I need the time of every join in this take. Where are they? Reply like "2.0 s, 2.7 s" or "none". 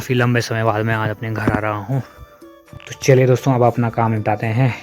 2.6 s

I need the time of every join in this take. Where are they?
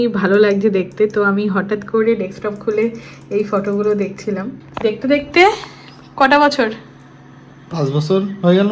4.6 s

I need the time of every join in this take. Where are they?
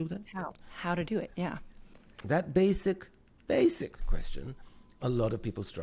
none

